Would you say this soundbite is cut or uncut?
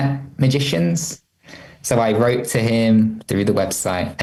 uncut